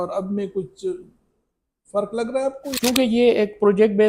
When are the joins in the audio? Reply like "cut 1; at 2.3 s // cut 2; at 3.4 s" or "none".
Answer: cut 1; at 2.6 s